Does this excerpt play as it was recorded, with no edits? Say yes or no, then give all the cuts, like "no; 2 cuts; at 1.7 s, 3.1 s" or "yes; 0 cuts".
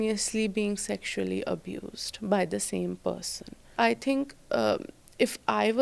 no; 1 cut; at 3.7 s